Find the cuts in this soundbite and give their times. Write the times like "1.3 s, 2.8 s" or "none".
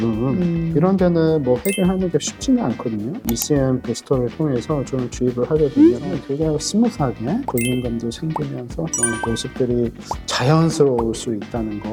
none